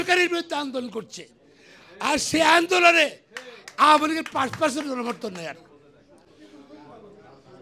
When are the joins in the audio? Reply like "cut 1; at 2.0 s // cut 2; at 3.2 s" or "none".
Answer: none